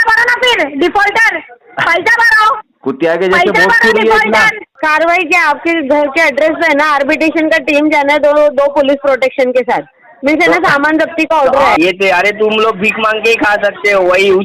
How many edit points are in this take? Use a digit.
2